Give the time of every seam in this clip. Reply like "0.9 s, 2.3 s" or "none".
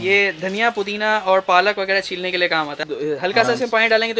2.7 s